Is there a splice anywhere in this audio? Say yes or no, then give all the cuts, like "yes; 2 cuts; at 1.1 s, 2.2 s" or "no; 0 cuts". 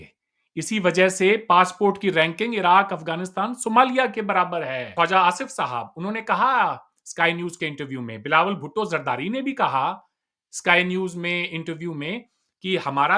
yes; 1 cut; at 4.9 s